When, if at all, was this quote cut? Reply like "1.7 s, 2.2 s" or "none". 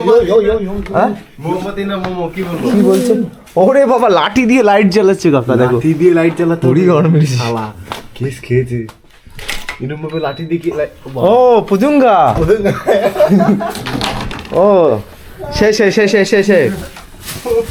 none